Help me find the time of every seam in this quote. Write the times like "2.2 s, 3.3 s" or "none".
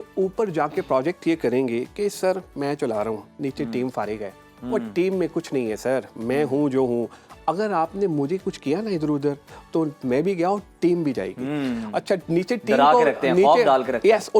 none